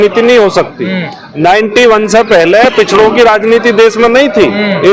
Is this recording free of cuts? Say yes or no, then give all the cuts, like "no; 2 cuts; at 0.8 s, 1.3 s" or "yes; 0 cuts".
yes; 0 cuts